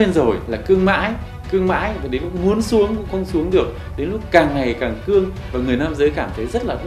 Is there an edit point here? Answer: no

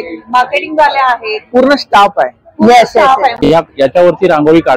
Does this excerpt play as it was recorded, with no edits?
no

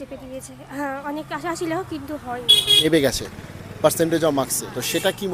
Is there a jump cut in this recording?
yes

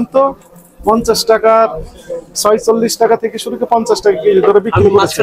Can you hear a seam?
no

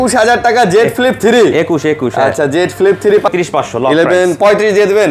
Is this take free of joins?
no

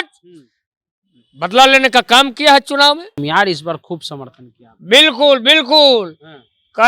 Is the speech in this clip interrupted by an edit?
yes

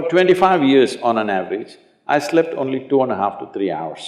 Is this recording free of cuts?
yes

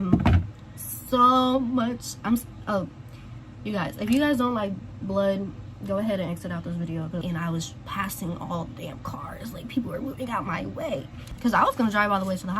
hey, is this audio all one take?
no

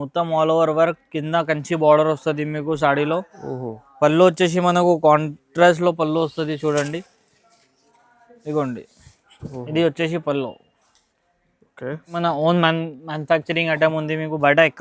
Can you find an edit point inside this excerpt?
yes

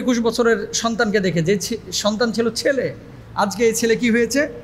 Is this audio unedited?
yes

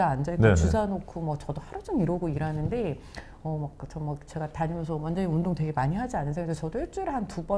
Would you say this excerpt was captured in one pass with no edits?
yes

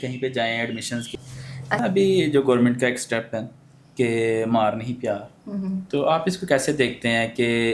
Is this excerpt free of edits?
no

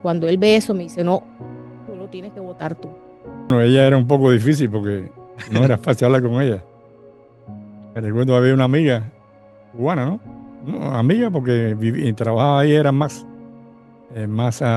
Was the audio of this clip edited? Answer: yes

